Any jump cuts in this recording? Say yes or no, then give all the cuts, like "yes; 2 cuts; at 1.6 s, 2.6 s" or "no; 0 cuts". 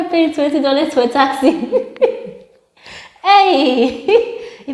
no; 0 cuts